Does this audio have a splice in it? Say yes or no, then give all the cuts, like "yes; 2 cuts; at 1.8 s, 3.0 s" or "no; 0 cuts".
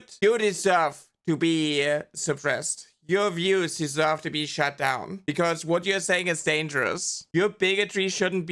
no; 0 cuts